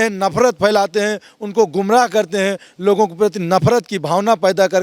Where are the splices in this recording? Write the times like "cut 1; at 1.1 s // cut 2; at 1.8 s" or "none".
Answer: none